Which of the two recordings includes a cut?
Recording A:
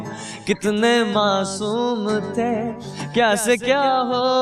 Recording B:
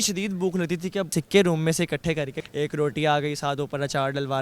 B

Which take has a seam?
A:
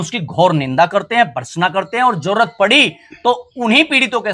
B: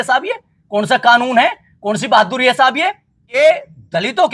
B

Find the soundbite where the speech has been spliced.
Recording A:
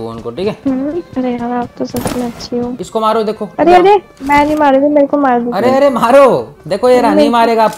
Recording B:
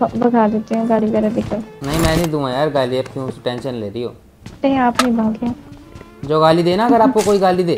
A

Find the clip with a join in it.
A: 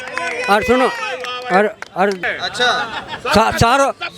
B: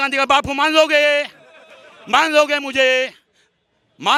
A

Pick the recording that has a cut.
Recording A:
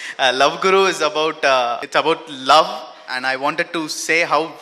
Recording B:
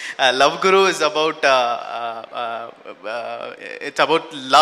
A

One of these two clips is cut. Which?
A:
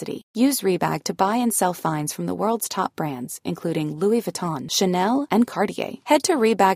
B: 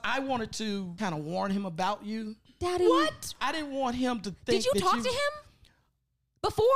B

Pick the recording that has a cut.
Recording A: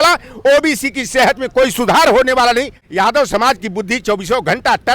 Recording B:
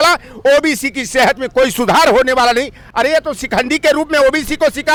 A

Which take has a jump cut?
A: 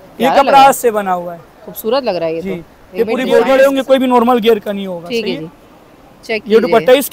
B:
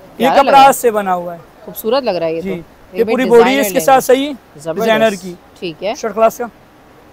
A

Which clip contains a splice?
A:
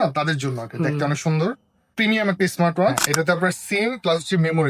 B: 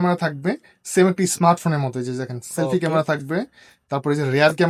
A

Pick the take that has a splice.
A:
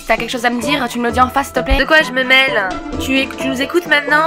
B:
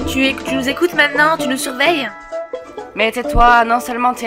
A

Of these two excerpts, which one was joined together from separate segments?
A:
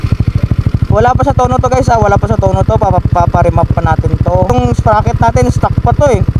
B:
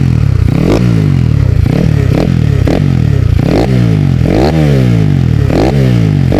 A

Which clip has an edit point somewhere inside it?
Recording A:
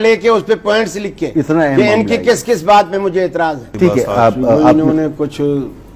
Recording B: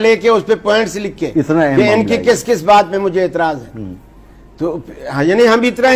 A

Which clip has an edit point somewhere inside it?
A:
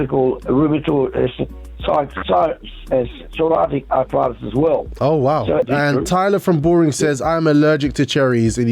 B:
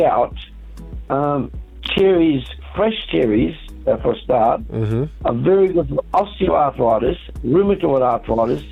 A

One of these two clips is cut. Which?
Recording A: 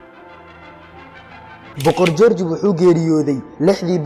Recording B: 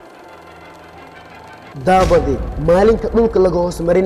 B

